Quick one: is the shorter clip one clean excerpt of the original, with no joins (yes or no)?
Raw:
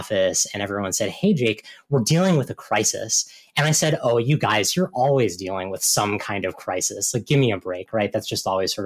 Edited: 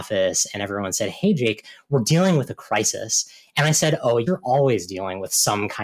no